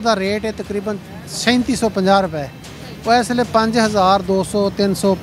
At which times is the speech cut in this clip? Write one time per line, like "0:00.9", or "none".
none